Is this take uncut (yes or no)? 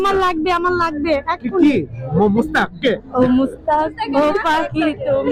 yes